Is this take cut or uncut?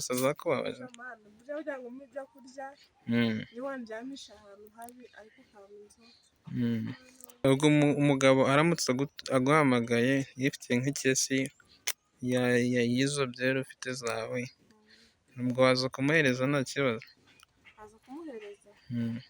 cut